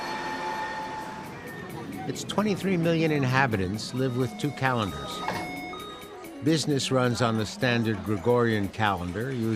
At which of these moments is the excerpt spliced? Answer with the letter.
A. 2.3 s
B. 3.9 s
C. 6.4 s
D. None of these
B